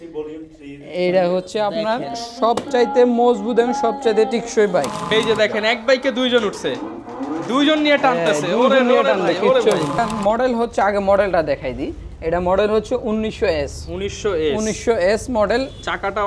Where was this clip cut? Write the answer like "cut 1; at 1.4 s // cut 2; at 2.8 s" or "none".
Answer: cut 1; at 5.0 s // cut 2; at 10.0 s